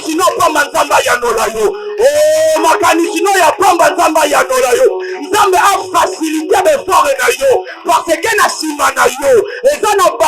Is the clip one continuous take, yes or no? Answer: yes